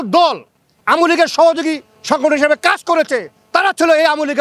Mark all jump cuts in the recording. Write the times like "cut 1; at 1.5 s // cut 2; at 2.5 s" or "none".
none